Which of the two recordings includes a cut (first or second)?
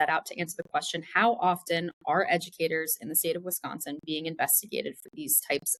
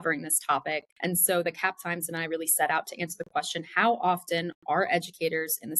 second